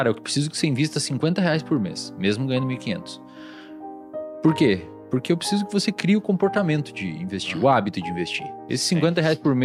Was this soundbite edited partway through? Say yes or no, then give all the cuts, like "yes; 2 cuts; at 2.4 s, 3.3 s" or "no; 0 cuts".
no; 0 cuts